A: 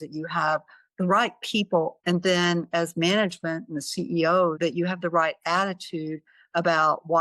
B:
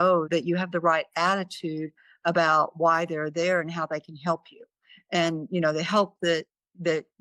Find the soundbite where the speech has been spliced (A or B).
A